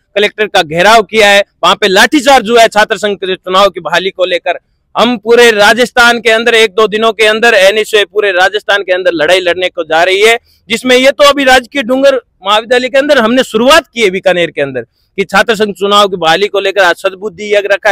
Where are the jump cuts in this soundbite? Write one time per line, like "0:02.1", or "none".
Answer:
none